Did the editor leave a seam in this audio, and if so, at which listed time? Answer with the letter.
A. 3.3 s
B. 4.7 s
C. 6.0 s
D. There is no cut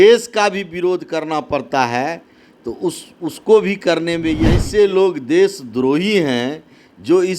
B